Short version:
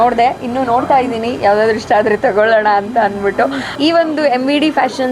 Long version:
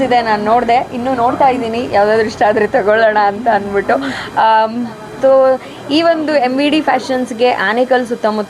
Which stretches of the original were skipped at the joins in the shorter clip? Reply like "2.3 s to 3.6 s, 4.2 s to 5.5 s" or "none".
4.2 s to 5.8 s